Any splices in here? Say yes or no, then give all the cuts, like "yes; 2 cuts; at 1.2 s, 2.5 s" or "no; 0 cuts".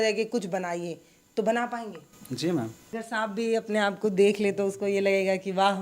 yes; 1 cut; at 2.8 s